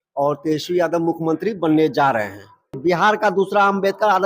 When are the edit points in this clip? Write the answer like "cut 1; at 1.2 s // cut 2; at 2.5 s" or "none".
cut 1; at 2.8 s